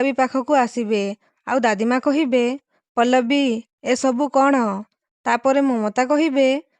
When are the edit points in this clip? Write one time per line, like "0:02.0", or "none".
none